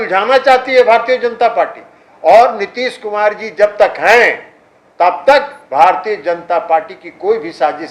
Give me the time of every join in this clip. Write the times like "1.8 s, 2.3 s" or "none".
none